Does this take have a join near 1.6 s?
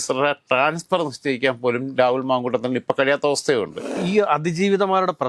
no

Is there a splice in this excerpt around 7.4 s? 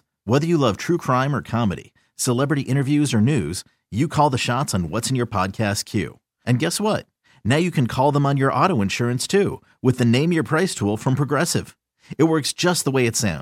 no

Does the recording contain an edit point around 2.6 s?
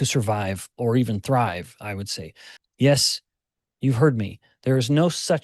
yes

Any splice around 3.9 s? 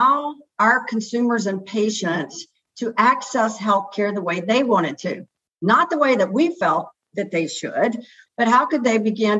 no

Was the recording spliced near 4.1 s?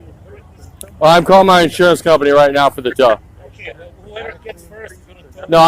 no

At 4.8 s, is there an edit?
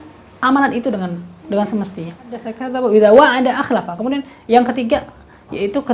no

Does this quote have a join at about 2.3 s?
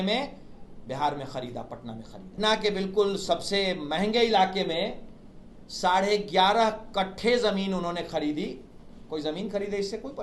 yes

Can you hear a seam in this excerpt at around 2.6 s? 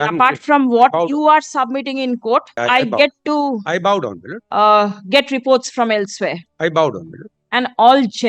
yes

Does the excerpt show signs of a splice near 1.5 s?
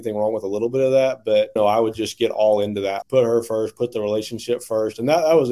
yes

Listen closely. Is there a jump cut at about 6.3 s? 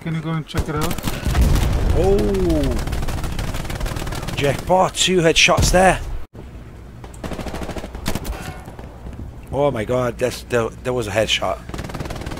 yes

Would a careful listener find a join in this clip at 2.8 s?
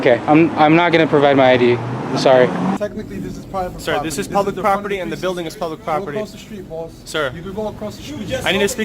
yes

